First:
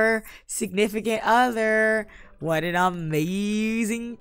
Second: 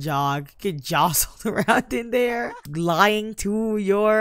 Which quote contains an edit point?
second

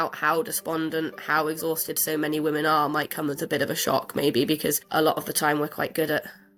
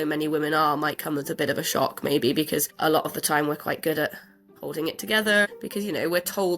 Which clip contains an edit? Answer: second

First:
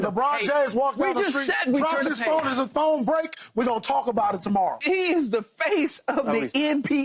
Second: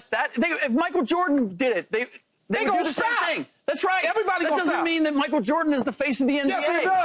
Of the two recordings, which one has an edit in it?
first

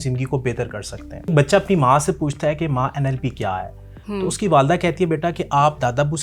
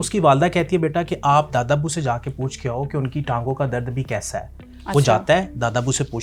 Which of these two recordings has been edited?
first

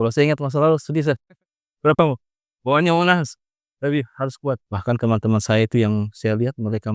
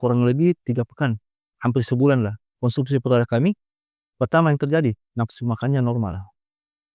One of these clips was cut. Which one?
first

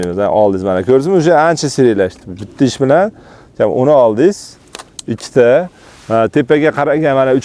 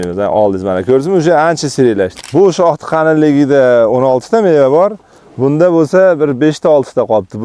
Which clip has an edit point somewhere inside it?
second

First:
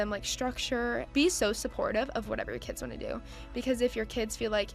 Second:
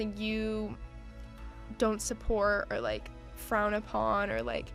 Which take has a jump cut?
first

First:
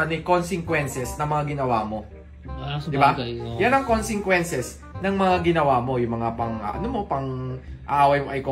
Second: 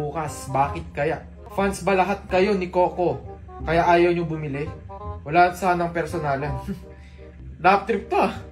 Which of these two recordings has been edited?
second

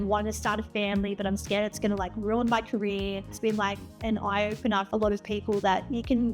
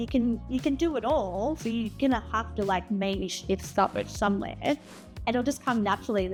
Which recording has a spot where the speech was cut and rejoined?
first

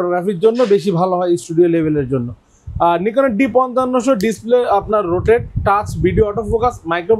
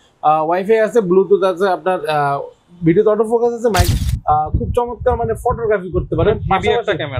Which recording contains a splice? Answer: second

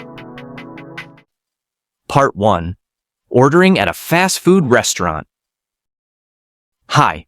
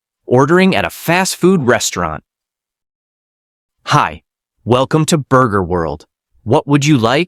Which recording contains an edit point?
first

